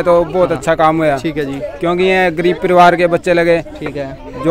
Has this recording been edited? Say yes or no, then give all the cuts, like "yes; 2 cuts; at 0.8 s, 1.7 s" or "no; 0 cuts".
no; 0 cuts